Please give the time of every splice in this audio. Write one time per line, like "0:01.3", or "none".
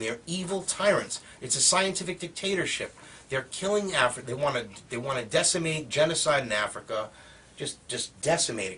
none